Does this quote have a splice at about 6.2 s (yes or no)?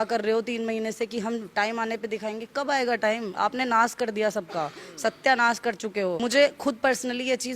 yes